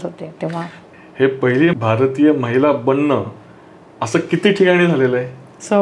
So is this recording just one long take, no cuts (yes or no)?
yes